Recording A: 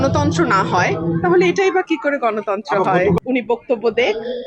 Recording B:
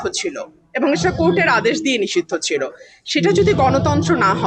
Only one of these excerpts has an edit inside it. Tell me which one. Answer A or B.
A